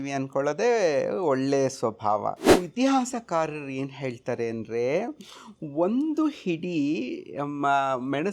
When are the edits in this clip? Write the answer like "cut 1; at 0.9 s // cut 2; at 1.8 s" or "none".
cut 1; at 2.6 s